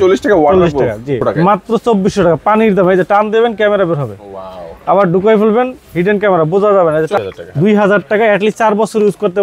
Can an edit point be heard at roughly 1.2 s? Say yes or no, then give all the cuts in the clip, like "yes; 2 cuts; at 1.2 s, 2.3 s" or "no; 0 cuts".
yes; 2 cuts; at 1.2 s, 7.1 s